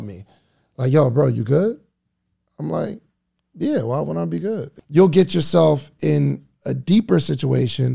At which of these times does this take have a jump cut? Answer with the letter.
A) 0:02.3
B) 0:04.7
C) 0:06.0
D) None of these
B